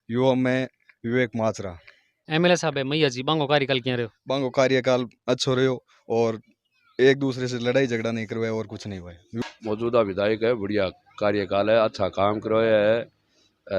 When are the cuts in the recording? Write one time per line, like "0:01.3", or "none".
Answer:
0:02.2
0:09.5